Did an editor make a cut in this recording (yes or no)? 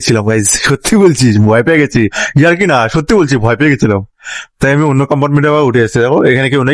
no